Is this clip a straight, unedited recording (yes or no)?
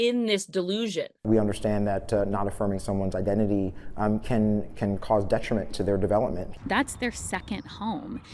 no